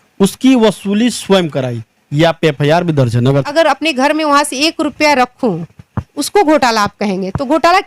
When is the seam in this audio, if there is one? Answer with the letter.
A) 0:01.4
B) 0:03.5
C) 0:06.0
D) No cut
B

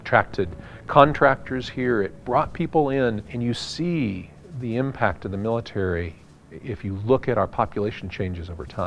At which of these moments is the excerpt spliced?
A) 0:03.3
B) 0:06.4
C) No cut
A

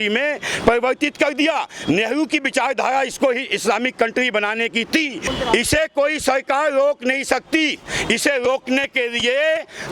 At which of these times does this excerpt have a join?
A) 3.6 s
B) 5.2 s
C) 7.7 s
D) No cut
B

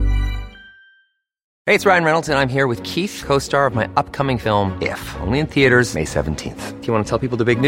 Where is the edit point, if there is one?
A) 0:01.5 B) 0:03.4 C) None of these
A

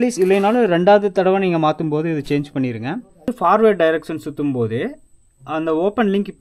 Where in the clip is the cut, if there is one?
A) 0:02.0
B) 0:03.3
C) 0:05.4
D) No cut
B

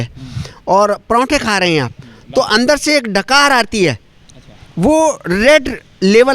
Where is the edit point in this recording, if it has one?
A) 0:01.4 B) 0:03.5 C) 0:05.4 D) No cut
D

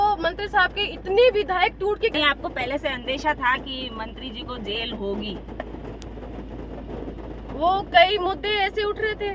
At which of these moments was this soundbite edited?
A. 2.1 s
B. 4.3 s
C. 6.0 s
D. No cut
A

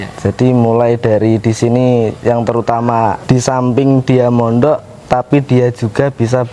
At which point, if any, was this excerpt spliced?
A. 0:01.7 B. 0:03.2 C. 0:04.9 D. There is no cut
B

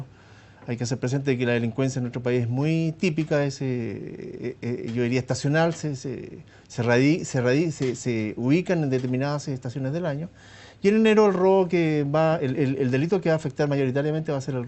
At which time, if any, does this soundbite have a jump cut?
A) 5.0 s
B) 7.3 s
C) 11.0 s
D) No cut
B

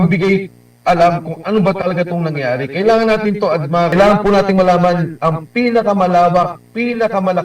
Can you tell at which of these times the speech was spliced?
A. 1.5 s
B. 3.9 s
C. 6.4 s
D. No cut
B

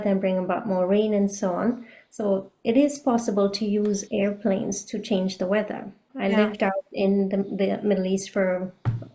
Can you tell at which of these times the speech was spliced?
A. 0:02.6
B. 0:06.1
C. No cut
B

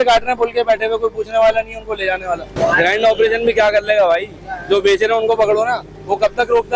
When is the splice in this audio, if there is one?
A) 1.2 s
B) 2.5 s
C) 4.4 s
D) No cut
B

